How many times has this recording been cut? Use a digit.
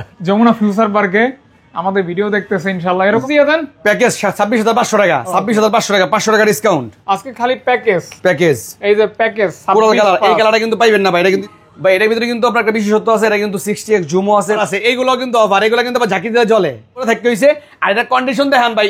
4